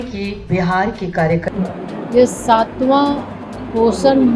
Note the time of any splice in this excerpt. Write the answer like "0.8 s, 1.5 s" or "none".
1.5 s